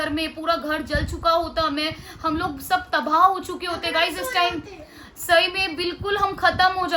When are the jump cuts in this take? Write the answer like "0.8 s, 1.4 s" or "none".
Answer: none